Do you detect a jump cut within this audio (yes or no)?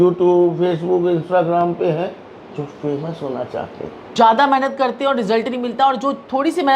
yes